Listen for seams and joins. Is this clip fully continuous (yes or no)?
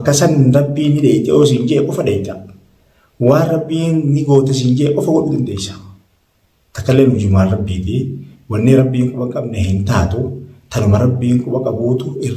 yes